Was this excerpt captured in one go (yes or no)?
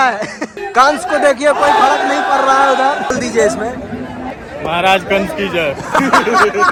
yes